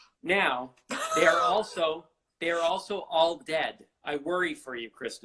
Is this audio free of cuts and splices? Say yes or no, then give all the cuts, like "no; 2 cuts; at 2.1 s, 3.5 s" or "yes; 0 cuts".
yes; 0 cuts